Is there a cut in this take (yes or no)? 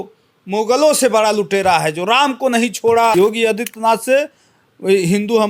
yes